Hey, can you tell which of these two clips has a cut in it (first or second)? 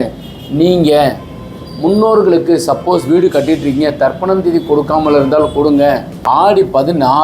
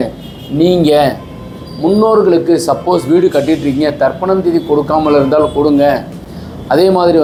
first